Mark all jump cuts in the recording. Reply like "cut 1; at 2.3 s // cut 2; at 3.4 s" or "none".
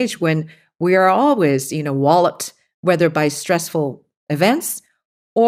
none